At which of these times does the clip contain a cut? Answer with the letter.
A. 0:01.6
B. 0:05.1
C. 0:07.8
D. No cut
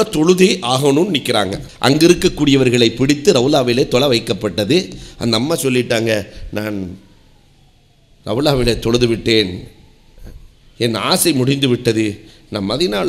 A